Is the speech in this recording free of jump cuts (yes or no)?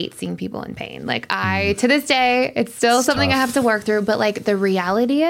yes